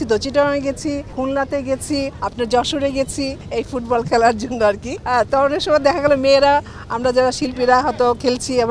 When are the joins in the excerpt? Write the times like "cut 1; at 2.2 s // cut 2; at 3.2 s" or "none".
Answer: cut 1; at 1.1 s // cut 2; at 2.2 s // cut 3; at 3.4 s // cut 4; at 4.9 s